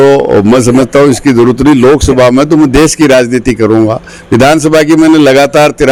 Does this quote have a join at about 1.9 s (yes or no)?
no